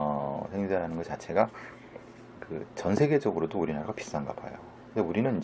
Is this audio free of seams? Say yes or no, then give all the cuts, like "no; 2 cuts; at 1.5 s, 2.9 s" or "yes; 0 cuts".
no; 1 cut; at 4.5 s